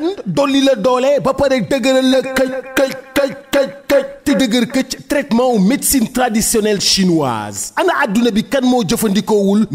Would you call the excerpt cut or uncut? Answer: uncut